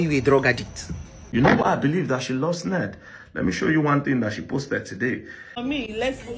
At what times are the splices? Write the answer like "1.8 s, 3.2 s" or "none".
1.2 s, 5.5 s

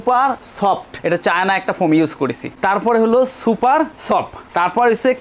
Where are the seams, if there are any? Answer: 1.0 s

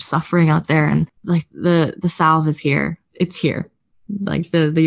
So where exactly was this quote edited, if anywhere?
1.2 s, 3.0 s

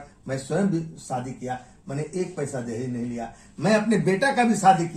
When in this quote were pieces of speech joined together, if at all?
none

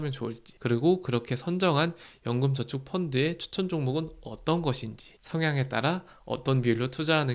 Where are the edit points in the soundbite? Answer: none

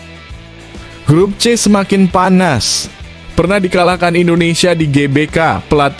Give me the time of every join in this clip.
1.0 s

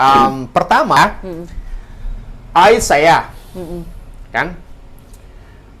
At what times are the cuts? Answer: 1.0 s

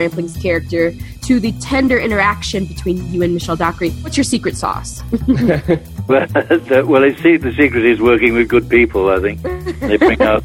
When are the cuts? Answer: 1.1 s, 4.1 s

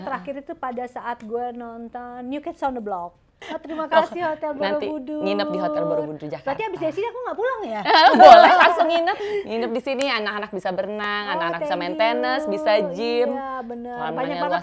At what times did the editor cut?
3.4 s, 9.2 s

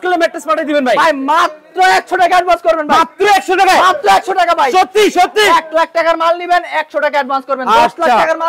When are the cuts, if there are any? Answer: none

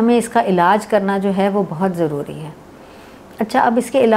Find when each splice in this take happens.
none

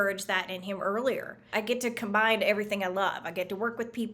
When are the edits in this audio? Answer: 1.5 s

